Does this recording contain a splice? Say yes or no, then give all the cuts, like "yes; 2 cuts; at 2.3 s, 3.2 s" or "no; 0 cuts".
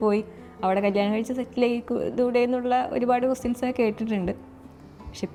no; 0 cuts